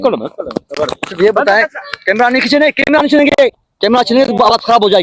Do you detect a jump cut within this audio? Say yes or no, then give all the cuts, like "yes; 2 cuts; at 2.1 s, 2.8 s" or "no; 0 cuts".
no; 0 cuts